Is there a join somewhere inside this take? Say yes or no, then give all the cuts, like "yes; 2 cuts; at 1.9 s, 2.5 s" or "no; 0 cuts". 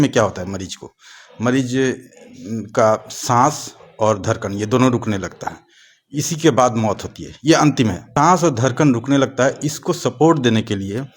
yes; 1 cut; at 8.0 s